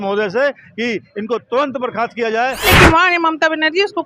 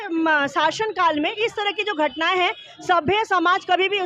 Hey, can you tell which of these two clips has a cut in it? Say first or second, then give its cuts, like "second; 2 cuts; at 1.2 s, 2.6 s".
first; 1 cut; at 2.7 s